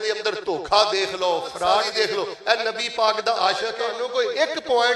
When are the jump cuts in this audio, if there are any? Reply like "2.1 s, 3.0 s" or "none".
1.9 s, 3.9 s